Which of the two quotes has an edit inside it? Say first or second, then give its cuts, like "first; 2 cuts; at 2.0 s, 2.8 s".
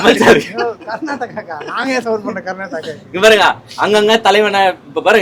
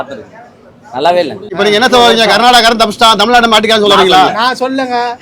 second; 1 cut; at 1.4 s